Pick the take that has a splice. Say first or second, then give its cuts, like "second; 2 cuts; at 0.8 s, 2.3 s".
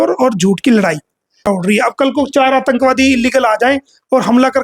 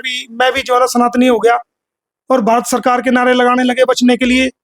first; 1 cut; at 1.5 s